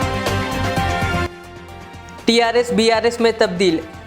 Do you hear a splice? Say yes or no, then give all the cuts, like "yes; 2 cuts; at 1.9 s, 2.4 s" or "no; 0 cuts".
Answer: no; 0 cuts